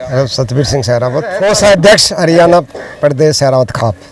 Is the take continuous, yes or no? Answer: no